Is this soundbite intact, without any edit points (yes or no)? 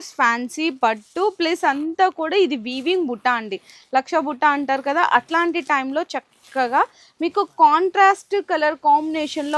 yes